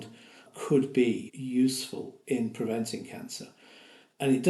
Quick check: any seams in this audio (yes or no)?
yes